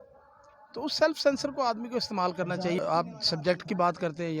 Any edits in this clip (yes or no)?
yes